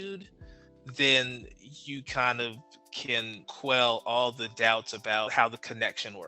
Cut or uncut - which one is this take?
cut